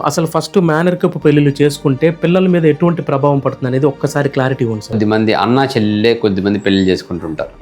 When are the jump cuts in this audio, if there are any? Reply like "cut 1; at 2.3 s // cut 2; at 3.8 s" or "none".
cut 1; at 5.0 s